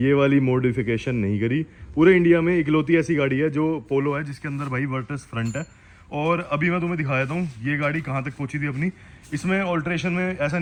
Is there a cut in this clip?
no; 0 cuts

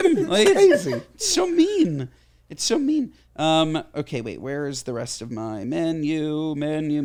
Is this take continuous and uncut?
yes; 0 cuts

